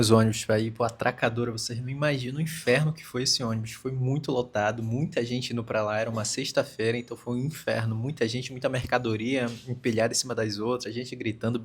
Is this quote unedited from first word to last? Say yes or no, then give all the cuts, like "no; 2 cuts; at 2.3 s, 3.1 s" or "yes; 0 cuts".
yes; 0 cuts